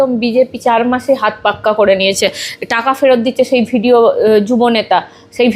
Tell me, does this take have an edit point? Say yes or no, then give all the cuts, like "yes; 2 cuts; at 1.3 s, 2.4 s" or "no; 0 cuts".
no; 0 cuts